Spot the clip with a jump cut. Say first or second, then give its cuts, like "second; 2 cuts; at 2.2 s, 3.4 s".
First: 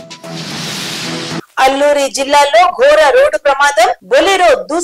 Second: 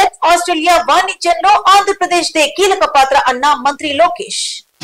first; 1 cut; at 1.4 s